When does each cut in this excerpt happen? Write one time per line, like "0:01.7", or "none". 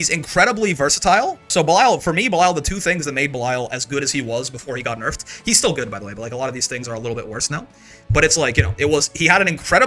0:01.4